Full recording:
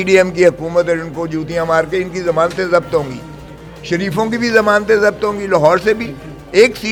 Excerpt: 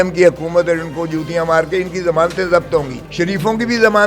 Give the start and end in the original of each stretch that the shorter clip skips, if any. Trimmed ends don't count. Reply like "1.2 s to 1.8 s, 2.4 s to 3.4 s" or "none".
3.2 s to 3.7 s